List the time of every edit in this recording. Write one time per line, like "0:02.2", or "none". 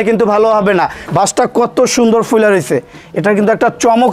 0:01.0

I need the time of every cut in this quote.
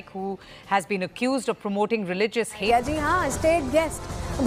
none

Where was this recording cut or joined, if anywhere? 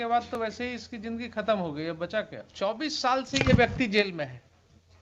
0:02.4

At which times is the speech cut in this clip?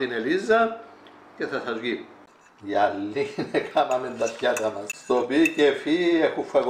0:02.2
0:04.9

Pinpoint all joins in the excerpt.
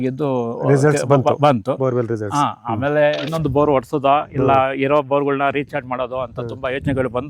0:03.2

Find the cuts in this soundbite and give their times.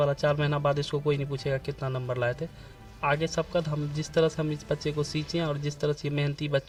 none

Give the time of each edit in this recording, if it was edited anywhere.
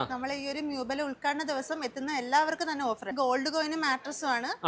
0:03.1

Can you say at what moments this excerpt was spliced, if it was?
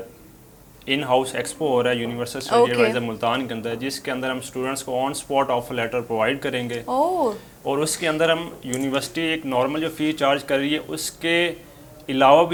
none

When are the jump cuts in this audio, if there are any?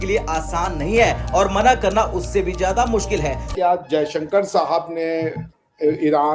0:03.5

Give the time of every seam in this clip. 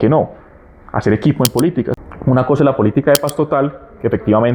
0:01.9

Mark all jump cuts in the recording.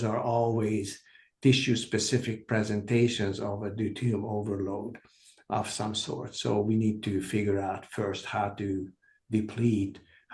none

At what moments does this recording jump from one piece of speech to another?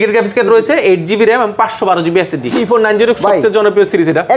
0:02.5

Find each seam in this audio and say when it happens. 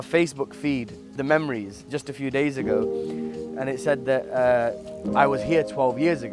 0:01.1

